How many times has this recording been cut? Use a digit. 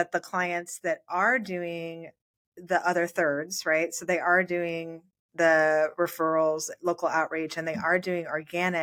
0